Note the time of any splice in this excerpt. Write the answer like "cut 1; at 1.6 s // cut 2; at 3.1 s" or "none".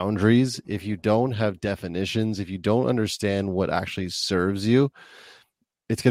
none